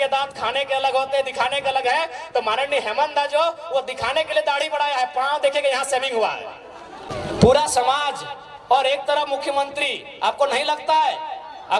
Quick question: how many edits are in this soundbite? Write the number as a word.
one